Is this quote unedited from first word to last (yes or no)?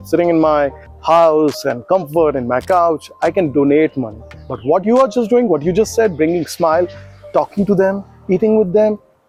yes